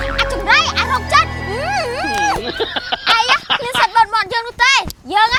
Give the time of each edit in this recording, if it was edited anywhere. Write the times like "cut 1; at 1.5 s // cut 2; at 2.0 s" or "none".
none